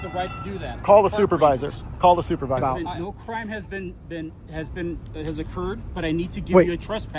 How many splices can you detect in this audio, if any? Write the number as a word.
one